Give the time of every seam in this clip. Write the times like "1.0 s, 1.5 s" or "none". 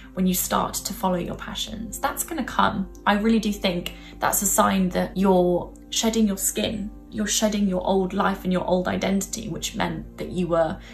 5.1 s, 7.0 s